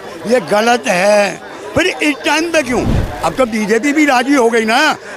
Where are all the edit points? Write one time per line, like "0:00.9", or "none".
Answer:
0:03.0